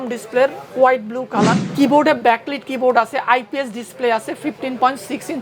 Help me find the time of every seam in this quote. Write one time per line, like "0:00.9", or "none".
0:01.6